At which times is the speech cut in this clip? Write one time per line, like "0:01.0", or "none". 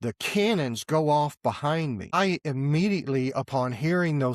0:02.1

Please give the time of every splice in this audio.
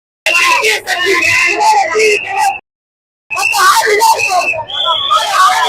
none

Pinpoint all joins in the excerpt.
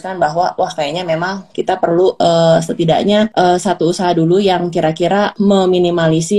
0:02.2
0:03.3
0:05.3

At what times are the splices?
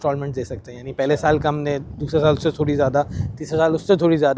none

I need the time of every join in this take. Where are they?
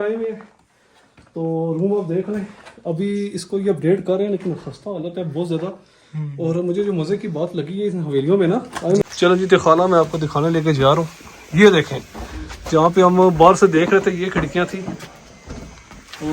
0:09.0

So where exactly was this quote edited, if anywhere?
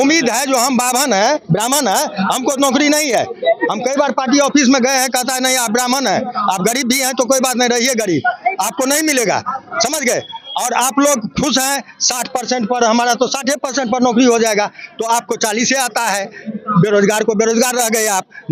none

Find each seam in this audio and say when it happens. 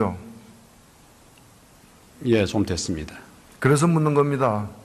0:03.7

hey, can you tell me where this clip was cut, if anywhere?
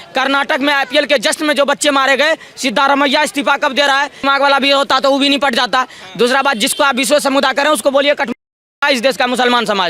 0:04.2

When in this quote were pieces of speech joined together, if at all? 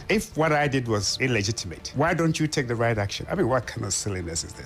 0:03.2

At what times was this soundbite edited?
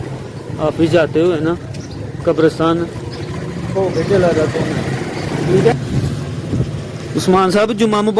0:05.7

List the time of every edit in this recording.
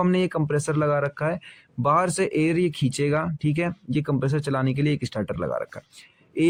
none

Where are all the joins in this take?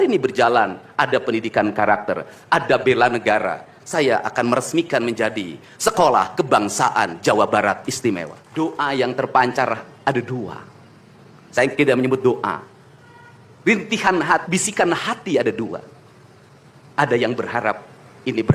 0:08.4

